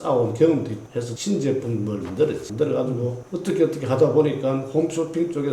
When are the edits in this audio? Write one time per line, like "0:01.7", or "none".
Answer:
none

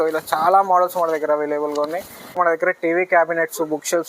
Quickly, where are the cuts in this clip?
0:02.6

